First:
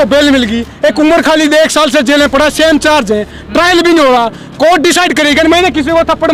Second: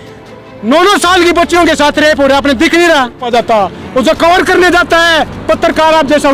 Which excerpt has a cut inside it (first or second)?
second